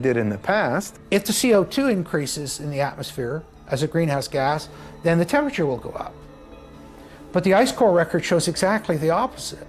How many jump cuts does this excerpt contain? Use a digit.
1